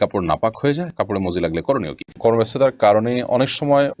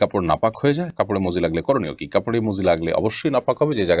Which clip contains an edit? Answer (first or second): first